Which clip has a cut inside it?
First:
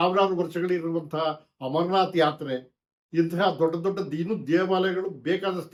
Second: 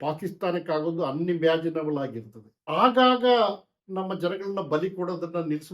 second; 2 cuts; at 2.5 s, 3.7 s

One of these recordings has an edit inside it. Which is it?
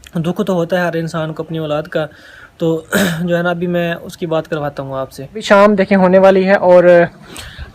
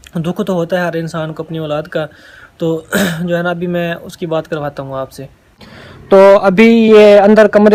first; 1 cut; at 5.4 s

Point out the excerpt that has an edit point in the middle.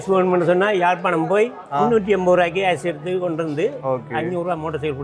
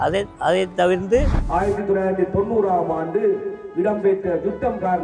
second; 1 cut; at 1.3 s

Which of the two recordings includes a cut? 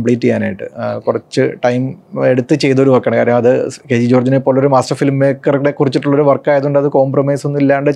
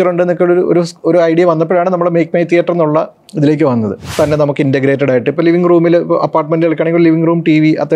second; 1 cut; at 4.0 s

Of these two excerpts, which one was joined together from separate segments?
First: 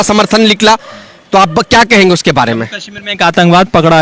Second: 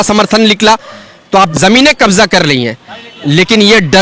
second; 1 cut; at 1.5 s

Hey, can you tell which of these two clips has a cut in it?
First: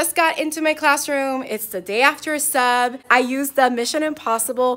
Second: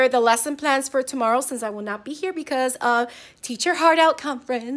first; 1 cut; at 3.0 s

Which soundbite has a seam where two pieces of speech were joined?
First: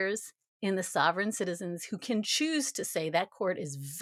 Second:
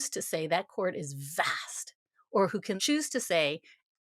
second; 1 cut; at 2.8 s

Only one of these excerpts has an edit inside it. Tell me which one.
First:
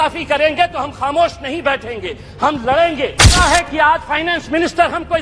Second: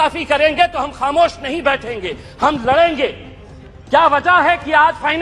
first; 1 cut; at 3.3 s

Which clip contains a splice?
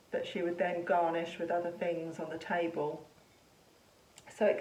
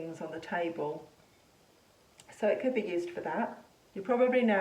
second; 1 cut; at 3.6 s

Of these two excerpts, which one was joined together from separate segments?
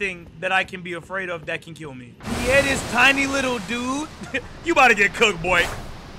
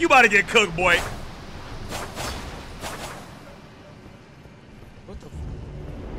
first; 1 cut; at 2.1 s

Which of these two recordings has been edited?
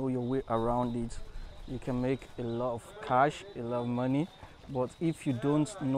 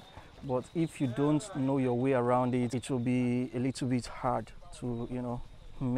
second; 1 cut; at 2.7 s

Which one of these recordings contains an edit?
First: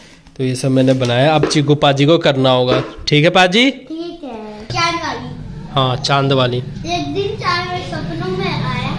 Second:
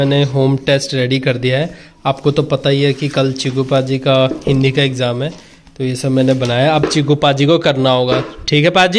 first; 1 cut; at 4.7 s

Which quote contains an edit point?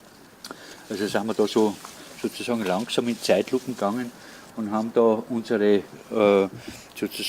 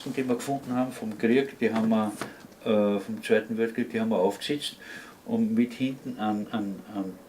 second; 1 cut; at 5.0 s

